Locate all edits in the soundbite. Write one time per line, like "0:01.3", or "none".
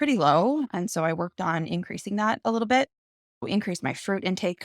0:03.5